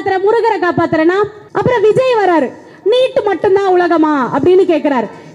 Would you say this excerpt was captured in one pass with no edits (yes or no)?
no